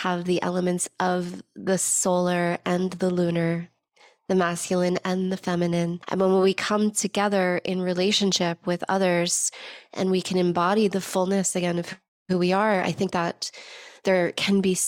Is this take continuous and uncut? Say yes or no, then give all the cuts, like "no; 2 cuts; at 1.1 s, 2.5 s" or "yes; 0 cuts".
no; 1 cut; at 6.0 s